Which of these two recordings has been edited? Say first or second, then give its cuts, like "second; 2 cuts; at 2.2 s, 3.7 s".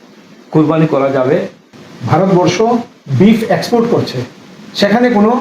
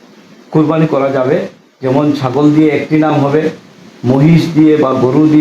first; 1 cut; at 1.7 s